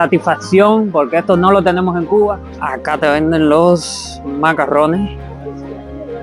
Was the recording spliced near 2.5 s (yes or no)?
yes